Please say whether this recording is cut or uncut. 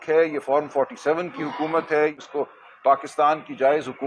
cut